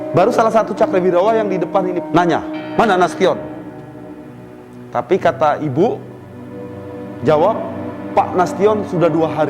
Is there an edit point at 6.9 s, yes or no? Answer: no